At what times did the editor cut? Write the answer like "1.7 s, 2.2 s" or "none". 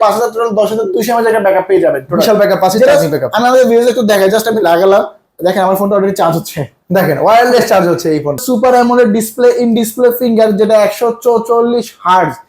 8.4 s